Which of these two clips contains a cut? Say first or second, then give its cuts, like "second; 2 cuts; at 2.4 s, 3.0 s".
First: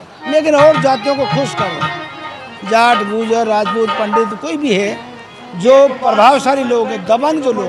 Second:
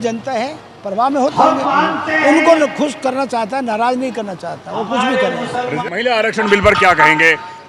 second; 1 cut; at 5.7 s